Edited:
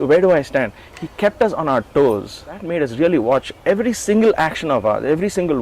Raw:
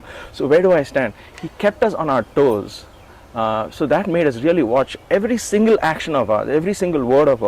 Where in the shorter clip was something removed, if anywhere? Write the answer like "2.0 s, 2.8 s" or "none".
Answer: 2.7 s